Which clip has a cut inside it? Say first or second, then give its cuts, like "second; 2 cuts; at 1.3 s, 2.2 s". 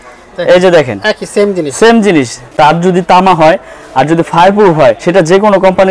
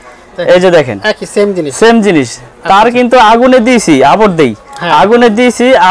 first; 2 cuts; at 2.4 s, 5.0 s